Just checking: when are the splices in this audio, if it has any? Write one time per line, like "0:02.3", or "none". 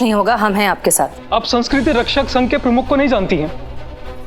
0:01.2